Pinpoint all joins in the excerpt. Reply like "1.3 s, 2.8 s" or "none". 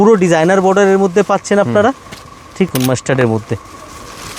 2.7 s